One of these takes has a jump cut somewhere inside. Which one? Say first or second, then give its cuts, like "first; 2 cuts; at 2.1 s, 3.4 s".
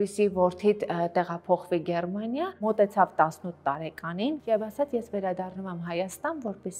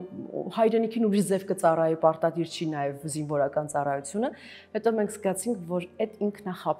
first; 2 cuts; at 2.6 s, 4.4 s